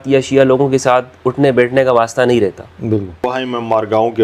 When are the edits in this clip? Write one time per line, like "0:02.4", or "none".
0:03.2